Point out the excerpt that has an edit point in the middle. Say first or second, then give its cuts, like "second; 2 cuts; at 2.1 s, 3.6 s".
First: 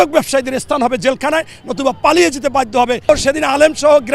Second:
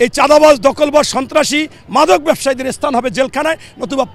first; 1 cut; at 3.1 s